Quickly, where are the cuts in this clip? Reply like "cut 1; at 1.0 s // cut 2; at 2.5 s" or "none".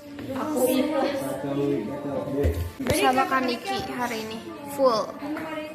cut 1; at 2.8 s